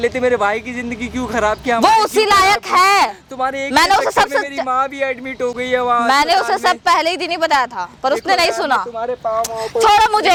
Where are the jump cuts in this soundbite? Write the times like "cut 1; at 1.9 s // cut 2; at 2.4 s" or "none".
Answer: none